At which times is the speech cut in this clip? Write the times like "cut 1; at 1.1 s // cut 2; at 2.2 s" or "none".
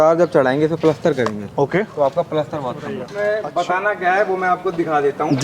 cut 1; at 3.0 s